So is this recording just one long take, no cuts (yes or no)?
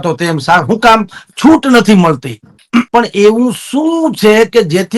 no